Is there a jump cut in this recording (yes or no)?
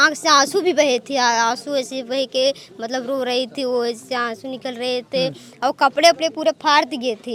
no